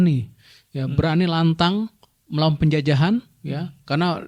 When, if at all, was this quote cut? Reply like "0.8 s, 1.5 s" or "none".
none